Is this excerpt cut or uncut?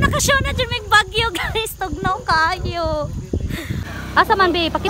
cut